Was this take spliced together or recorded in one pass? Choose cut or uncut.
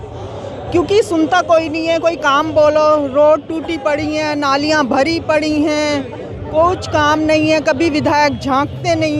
uncut